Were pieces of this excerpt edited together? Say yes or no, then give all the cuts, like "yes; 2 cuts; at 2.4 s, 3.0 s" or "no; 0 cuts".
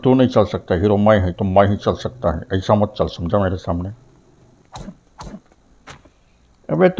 yes; 1 cut; at 4.6 s